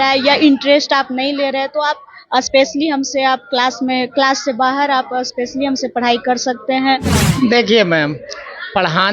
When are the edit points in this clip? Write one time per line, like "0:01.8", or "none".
0:07.2